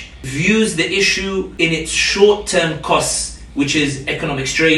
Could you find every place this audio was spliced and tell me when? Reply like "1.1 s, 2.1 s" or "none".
1.5 s